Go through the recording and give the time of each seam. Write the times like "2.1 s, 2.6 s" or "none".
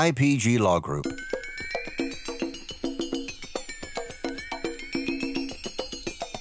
1.0 s